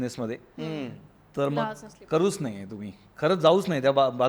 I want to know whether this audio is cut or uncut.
uncut